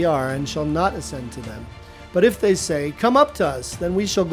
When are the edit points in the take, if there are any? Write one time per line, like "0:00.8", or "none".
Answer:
none